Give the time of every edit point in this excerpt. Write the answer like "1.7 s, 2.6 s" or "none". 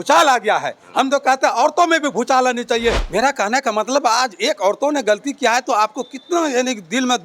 3.0 s

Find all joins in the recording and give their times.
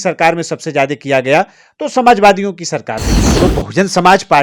3.2 s

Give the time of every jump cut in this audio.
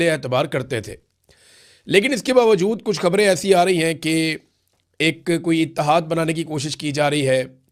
none

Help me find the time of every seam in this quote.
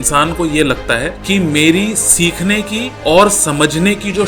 1.2 s, 2.8 s

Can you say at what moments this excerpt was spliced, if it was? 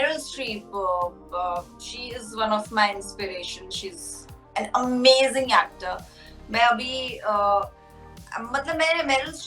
none

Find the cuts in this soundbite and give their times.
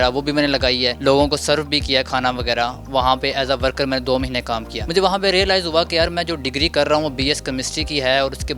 none

